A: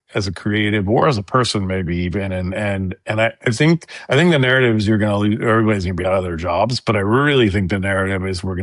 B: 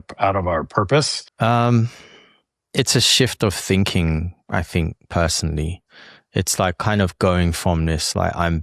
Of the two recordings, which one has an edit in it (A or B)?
B